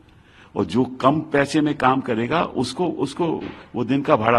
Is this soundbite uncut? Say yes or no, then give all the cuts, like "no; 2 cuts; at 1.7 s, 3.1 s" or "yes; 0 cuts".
yes; 0 cuts